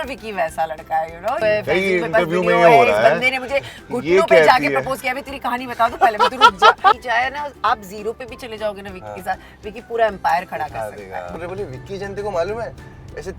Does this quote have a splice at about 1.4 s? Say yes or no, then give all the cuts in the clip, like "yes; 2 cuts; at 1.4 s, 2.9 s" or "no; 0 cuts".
yes; 3 cuts; at 1.4 s, 7.0 s, 11.3 s